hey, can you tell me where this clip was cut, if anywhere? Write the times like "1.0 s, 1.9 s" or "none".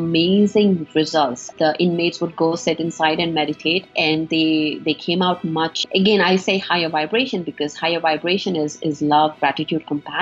1.5 s, 3.9 s, 5.8 s